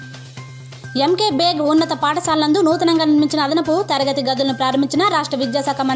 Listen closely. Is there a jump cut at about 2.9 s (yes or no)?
no